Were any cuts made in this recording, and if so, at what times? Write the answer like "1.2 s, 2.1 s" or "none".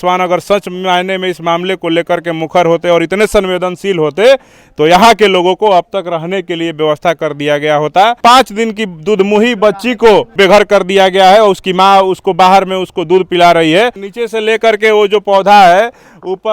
8.2 s, 10.3 s, 14.0 s